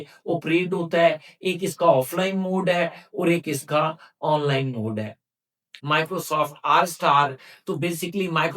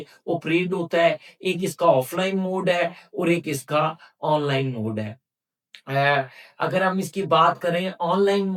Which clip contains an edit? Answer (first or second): first